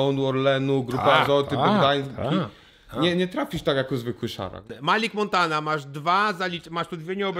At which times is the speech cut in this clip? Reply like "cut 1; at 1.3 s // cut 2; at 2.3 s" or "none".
cut 1; at 4.6 s

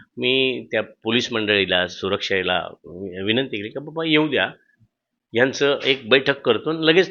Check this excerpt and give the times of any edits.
none

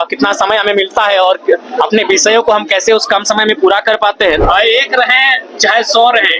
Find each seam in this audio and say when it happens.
cut 1; at 4.4 s

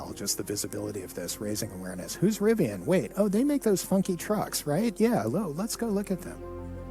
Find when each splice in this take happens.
none

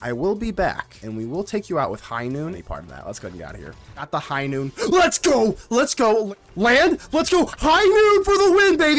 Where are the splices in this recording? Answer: cut 1; at 1.0 s // cut 2; at 2.6 s // cut 3; at 4.1 s // cut 4; at 6.3 s

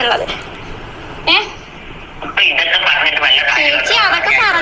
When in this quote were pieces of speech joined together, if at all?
none

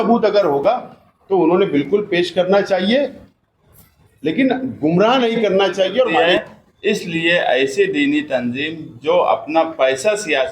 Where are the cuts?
cut 1; at 6.2 s

